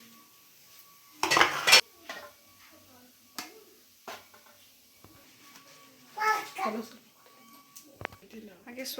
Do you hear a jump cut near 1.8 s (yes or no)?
yes